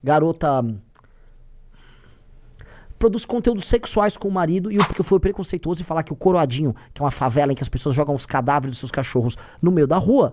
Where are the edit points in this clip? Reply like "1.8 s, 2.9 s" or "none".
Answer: 4.9 s